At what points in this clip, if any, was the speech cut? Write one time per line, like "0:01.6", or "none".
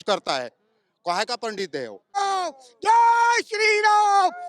0:02.2